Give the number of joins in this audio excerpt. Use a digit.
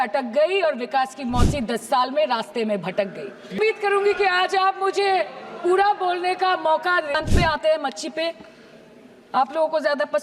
2